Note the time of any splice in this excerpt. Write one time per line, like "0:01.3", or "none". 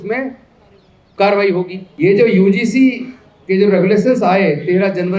0:01.8